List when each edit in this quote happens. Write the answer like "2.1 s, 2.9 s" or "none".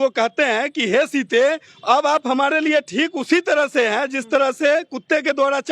1.7 s

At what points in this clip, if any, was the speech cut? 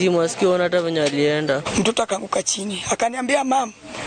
1.7 s

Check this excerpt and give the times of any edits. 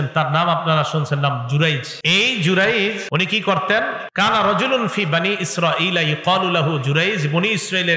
1.9 s, 3.0 s, 4.0 s

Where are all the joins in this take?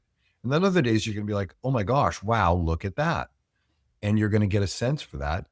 none

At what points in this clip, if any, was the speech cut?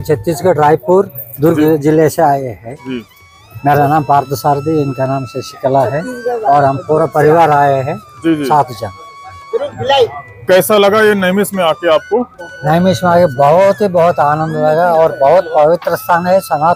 none

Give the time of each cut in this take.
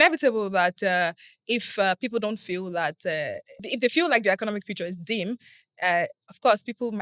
3.6 s

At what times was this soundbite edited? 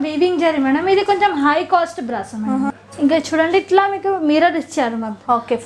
2.8 s

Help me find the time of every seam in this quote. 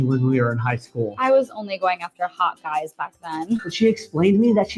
none

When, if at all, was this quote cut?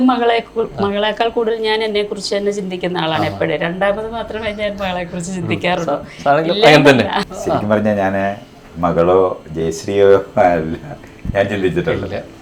7.3 s

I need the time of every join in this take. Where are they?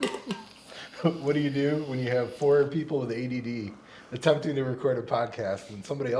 none

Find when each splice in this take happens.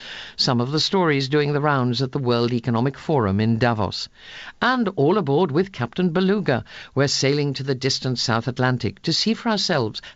4.0 s

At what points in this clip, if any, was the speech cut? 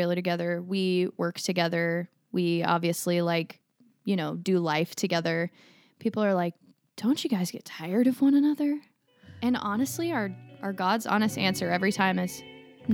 none

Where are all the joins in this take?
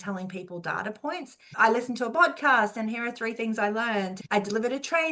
1.4 s, 4.1 s

